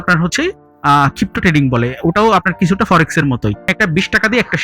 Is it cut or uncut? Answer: cut